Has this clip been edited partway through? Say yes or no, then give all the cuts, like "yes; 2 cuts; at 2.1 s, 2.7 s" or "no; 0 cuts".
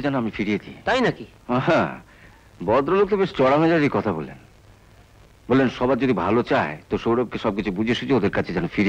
no; 0 cuts